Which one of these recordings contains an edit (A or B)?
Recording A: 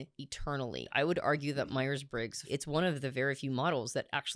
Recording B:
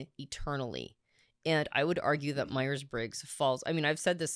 A